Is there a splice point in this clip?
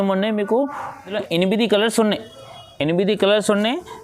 yes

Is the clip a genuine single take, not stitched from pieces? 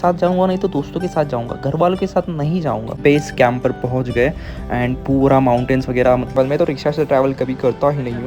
no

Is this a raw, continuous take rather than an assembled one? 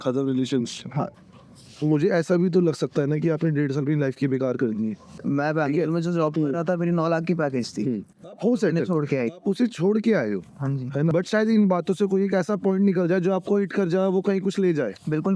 no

